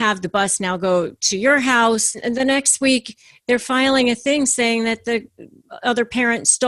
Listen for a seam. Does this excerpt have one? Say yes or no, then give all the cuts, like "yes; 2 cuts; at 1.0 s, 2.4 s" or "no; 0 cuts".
yes; 1 cut; at 2.2 s